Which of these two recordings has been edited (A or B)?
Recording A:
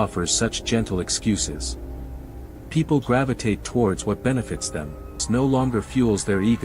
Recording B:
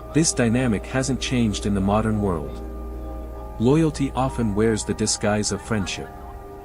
A